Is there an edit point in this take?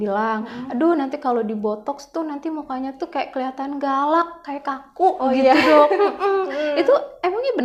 no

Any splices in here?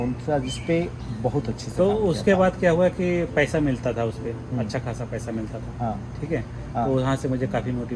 no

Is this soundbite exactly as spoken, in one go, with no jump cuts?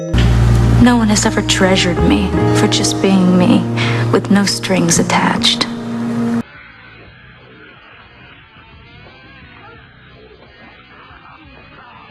no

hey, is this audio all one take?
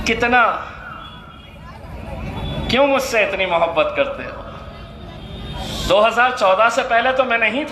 yes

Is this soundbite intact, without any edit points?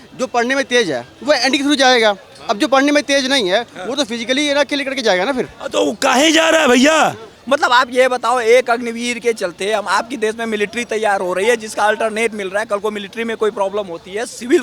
no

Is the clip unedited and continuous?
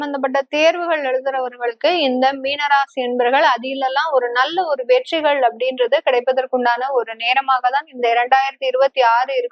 yes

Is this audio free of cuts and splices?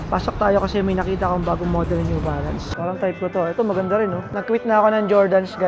no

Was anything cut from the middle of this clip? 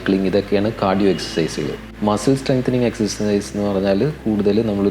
no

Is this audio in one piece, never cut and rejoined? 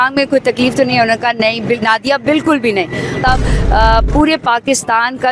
no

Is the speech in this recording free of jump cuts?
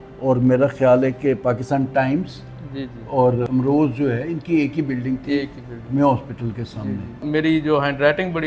no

